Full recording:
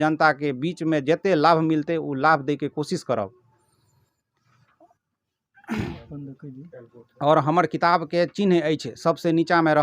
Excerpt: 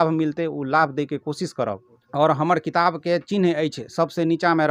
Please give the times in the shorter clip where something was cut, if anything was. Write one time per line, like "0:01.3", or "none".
0:01.9